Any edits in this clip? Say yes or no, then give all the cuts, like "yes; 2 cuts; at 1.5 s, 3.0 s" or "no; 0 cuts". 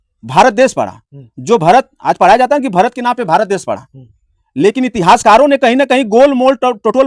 no; 0 cuts